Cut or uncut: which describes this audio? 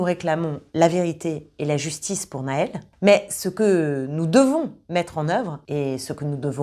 cut